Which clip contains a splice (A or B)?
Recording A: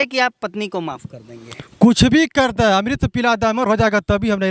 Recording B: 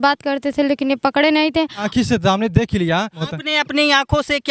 B